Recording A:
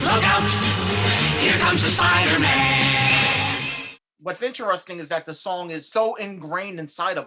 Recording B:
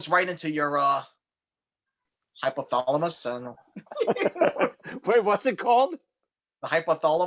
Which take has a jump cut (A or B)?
A